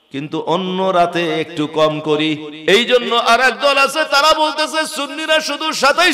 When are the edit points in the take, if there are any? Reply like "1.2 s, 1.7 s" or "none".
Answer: 2.5 s